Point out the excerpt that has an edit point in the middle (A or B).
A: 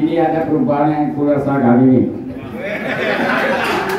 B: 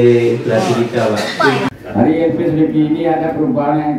B